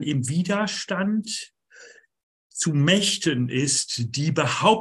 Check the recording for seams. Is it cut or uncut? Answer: uncut